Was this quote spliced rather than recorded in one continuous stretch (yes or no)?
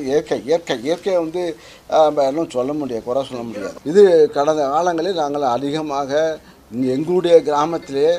yes